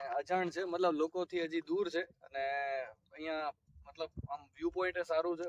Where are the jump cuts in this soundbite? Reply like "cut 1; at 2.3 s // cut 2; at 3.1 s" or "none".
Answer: none